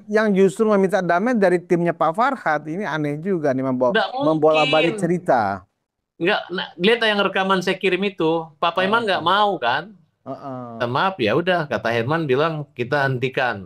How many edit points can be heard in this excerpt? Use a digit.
1